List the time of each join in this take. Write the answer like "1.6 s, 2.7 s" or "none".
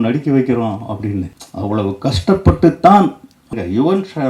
1.4 s, 3.5 s